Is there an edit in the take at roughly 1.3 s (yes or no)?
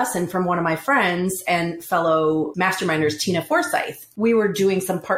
no